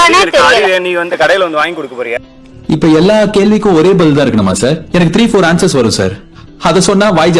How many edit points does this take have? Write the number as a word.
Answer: zero